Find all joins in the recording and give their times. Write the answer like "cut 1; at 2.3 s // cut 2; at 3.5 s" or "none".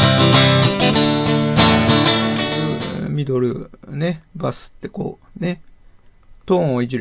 cut 1; at 2.5 s